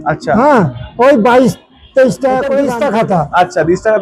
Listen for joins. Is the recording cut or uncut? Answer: cut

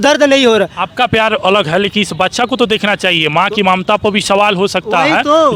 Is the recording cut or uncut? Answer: uncut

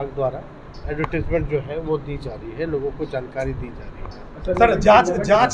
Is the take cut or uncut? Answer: uncut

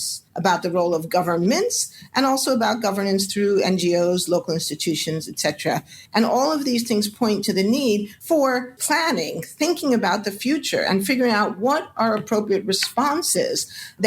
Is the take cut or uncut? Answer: cut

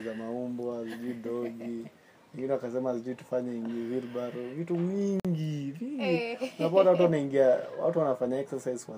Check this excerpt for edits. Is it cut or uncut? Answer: uncut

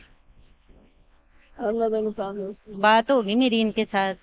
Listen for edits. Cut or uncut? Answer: uncut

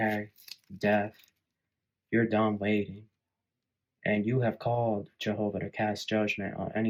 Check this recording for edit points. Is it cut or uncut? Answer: uncut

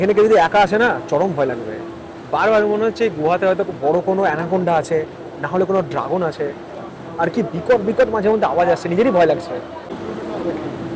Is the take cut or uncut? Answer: uncut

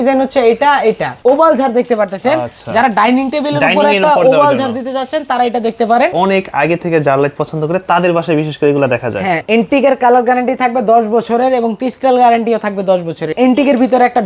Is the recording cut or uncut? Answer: cut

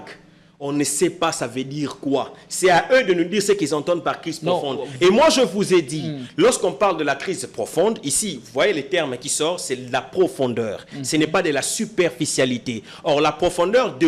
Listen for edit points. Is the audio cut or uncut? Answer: uncut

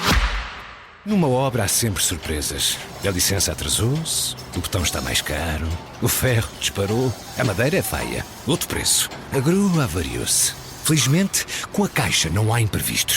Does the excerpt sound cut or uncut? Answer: cut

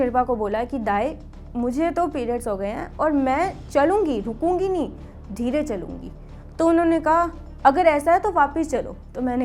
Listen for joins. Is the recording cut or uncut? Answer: uncut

